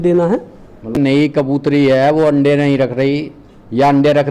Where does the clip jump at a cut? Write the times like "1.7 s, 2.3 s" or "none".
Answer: 1.0 s